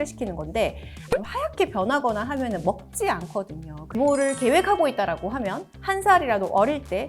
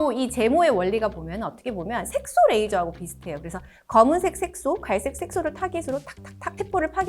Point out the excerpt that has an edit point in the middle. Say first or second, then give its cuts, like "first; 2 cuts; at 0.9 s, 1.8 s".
first; 2 cuts; at 1.0 s, 4.0 s